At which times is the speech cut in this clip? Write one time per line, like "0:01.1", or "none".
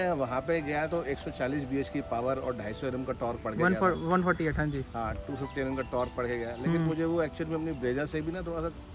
none

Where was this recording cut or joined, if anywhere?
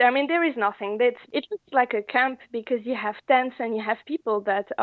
0:01.2

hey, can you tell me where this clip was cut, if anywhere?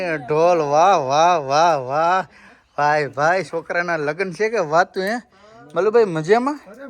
none

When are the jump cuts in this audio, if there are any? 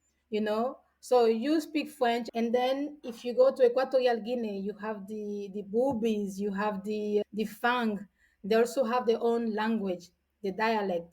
0:02.2

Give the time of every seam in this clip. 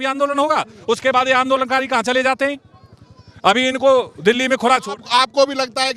none

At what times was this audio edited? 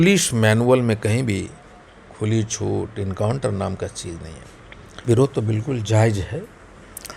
0:05.0

